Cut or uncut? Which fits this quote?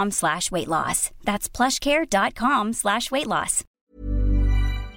cut